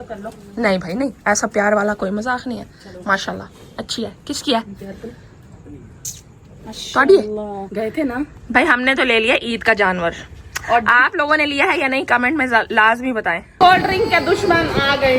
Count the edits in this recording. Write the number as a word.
two